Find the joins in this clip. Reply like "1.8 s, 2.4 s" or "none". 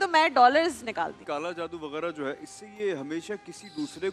1.2 s